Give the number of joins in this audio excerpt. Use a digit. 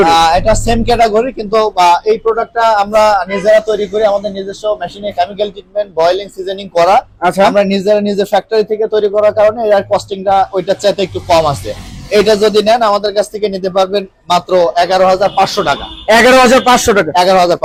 0